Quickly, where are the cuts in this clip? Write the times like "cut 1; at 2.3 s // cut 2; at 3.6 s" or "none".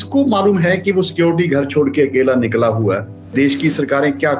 cut 1; at 3.3 s